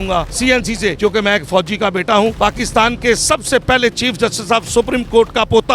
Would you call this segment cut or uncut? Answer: uncut